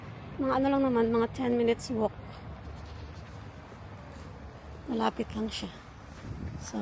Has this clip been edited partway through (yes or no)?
no